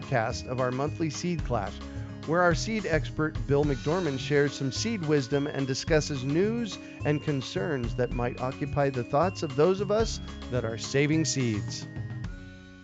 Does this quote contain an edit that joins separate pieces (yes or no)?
yes